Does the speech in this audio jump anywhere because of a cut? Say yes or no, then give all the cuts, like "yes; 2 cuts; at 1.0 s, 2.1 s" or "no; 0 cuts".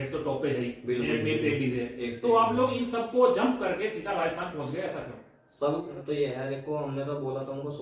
yes; 1 cut; at 6.0 s